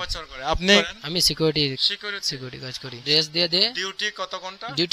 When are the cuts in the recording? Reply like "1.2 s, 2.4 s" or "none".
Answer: 1.0 s, 3.0 s